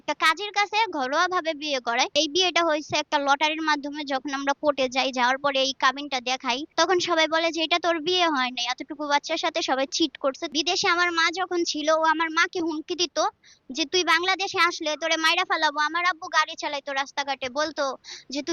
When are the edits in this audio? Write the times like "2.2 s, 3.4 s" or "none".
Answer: 2.1 s, 6.7 s, 10.5 s